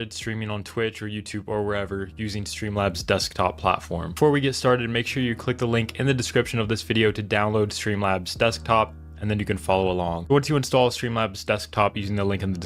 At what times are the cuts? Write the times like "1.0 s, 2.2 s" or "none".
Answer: 1.6 s